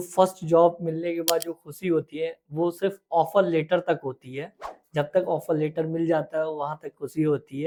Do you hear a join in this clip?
no; 0 cuts

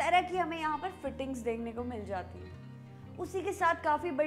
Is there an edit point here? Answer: no; 0 cuts

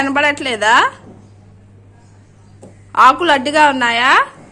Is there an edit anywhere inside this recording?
no; 0 cuts

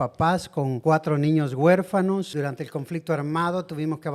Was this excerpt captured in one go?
no; 1 cut; at 2.3 s

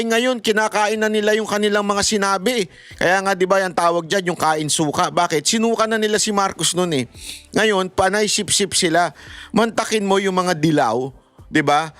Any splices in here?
no; 0 cuts

